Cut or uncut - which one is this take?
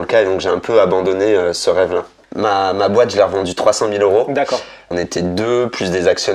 cut